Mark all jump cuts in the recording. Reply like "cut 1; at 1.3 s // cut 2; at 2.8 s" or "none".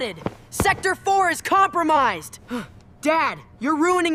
none